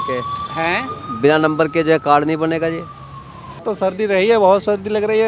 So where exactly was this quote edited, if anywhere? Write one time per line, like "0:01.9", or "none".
0:03.6